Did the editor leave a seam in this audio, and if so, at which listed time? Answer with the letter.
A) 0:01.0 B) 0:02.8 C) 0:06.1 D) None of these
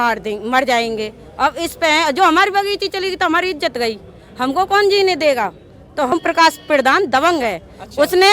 C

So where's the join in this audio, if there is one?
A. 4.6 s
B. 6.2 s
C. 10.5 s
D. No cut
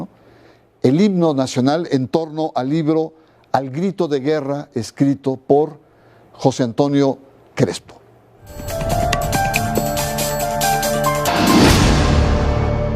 C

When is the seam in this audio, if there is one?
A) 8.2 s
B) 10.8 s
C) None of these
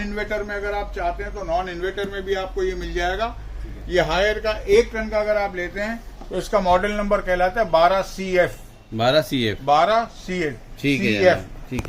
C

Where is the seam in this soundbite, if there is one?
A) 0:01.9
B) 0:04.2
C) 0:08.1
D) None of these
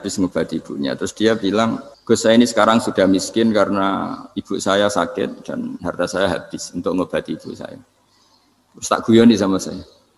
A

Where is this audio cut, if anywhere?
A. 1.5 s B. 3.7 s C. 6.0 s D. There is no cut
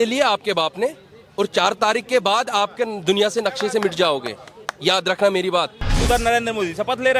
C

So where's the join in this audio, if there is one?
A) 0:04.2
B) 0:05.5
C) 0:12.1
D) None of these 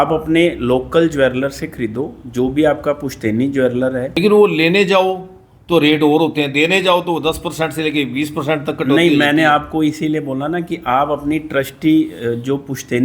A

